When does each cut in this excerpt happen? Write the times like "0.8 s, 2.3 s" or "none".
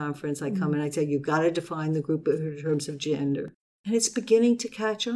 3.5 s